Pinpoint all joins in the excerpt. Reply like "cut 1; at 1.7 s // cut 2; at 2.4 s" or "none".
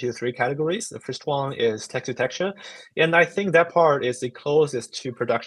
none